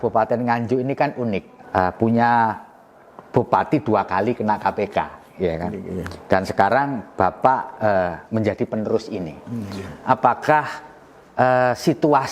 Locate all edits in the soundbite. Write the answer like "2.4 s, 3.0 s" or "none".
1.5 s